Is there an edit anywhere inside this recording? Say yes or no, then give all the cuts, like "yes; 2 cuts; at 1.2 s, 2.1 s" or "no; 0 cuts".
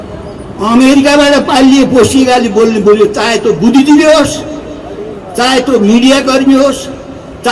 no; 0 cuts